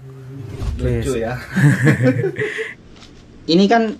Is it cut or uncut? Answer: cut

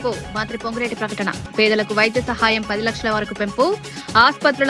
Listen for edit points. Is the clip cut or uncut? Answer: uncut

